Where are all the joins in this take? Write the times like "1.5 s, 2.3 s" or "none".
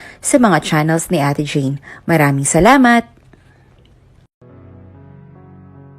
4.4 s